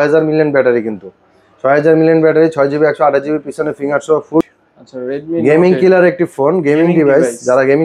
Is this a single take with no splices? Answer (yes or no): no